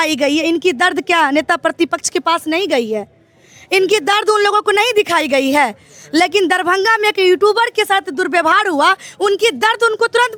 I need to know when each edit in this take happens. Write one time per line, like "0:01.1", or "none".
none